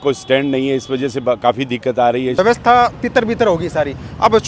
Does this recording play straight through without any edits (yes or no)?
no